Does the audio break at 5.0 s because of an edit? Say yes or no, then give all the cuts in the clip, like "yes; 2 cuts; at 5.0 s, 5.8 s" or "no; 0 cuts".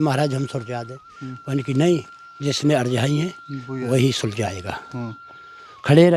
no; 0 cuts